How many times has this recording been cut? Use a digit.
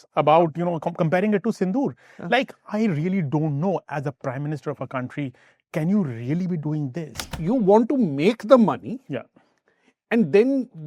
1